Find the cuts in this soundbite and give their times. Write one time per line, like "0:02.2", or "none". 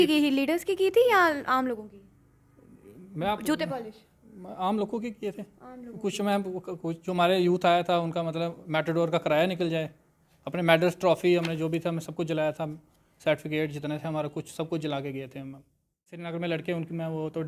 0:16.3